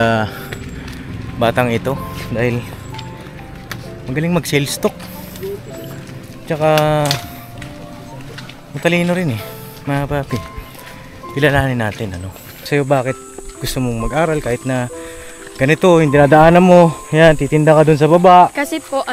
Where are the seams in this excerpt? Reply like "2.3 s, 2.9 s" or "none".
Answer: 12.7 s